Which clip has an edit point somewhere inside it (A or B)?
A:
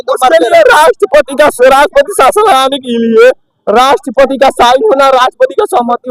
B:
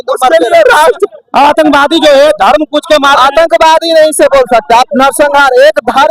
B